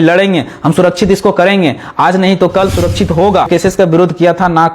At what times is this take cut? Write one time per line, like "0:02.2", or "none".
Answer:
0:03.5